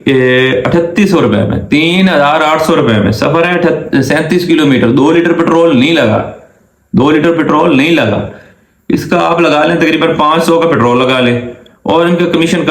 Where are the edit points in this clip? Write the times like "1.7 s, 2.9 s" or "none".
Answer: none